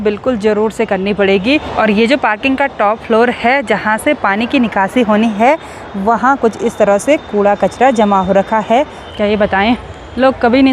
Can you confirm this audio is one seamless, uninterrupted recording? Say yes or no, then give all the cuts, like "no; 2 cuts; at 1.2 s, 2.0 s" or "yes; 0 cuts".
no; 2 cuts; at 1.7 s, 9.0 s